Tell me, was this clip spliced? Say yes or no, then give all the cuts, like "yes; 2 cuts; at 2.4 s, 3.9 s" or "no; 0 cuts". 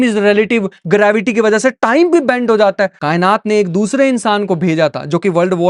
yes; 1 cut; at 3.0 s